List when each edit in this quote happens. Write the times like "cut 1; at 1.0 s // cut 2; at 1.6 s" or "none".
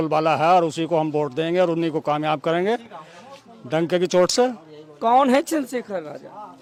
none